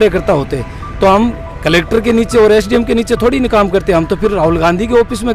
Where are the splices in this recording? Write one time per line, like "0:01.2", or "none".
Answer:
0:01.5

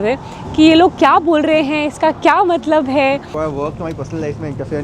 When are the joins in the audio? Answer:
0:03.3

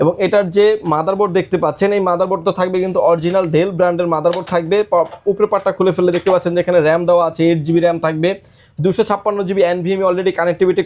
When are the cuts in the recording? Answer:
none

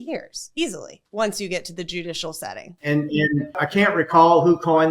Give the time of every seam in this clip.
0:02.7
0:03.6

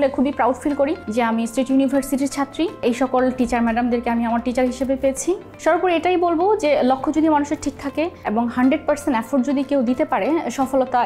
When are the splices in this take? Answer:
0:01.0
0:02.8
0:05.5
0:08.2

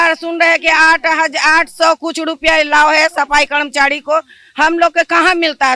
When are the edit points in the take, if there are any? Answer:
none

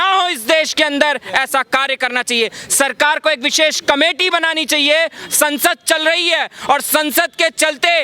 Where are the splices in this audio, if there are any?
none

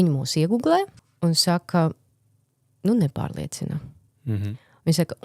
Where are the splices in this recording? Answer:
0:01.0

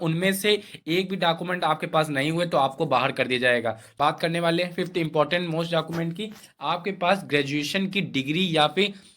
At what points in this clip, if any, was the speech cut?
0:03.8

